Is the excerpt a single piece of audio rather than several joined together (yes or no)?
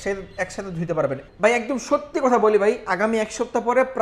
no